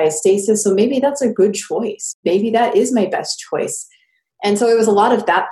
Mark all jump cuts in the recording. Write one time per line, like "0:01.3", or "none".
0:02.1